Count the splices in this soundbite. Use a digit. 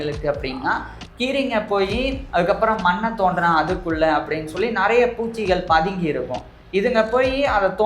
1